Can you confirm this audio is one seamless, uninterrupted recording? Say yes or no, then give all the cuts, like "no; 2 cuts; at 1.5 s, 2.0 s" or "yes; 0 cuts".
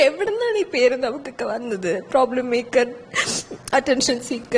yes; 0 cuts